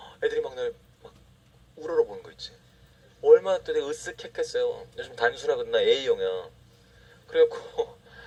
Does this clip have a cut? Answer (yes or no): no